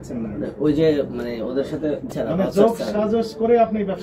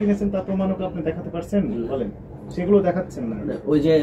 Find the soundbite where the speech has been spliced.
first; 1 cut; at 2.1 s

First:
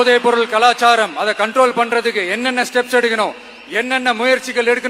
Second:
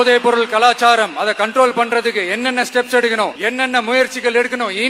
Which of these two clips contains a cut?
second; 1 cut; at 3.4 s

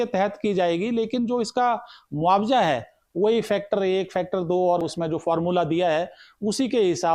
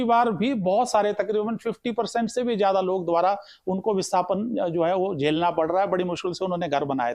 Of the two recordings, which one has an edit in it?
first; 2 cuts; at 3.0 s, 4.8 s

